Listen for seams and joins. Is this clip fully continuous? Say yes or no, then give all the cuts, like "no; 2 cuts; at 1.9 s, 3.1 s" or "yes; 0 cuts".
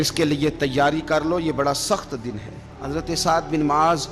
no; 1 cut; at 2.7 s